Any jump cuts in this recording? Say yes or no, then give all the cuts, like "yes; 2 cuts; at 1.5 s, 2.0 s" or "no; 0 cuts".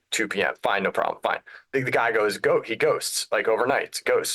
yes; 1 cut; at 1.5 s